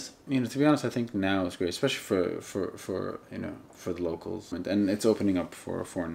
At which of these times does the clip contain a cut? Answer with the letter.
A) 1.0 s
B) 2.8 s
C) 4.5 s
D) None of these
C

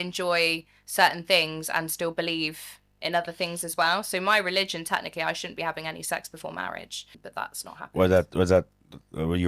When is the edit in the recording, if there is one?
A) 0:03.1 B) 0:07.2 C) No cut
B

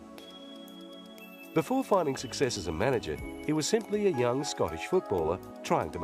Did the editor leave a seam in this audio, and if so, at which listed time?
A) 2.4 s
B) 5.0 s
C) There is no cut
A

